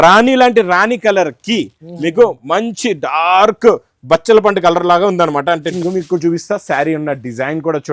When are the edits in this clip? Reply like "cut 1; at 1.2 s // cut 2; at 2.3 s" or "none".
cut 1; at 5.7 s